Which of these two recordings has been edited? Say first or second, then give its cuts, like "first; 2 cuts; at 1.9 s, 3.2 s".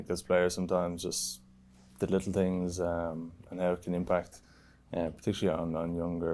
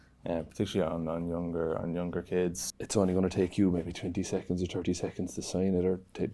second; 1 cut; at 2.7 s